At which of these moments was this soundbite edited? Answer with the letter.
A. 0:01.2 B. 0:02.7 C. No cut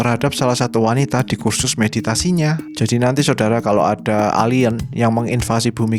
B